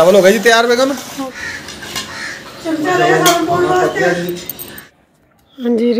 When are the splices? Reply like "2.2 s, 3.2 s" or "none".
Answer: 1.1 s, 4.9 s